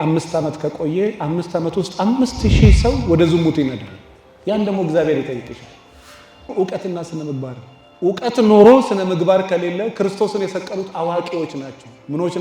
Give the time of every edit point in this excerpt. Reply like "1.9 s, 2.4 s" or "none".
6.5 s

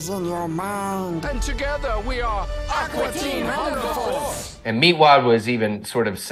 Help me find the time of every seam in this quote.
4.4 s

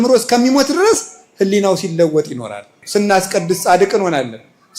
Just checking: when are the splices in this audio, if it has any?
2.8 s

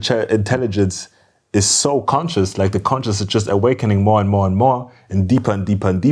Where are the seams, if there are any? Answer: none

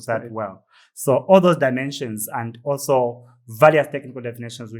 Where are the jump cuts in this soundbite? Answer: none

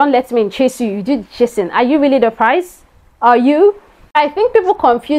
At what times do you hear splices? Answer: none

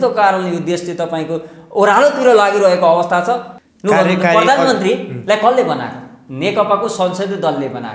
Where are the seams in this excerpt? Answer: 3.5 s

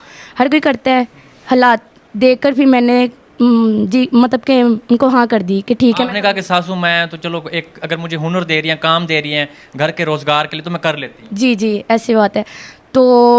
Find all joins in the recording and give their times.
none

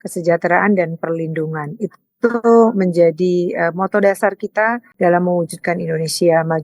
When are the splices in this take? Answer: 4.9 s

